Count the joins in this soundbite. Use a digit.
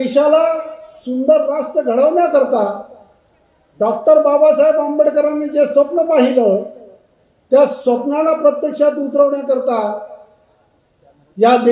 0